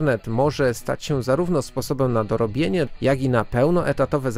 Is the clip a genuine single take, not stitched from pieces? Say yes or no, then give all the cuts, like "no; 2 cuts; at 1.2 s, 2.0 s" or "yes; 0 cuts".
no; 1 cut; at 2.9 s